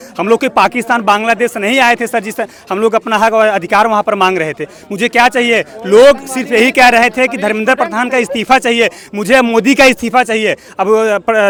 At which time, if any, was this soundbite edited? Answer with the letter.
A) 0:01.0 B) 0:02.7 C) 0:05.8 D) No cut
D